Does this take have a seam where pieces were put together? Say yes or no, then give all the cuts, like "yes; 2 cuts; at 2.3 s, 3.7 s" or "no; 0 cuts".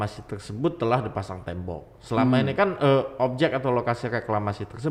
no; 0 cuts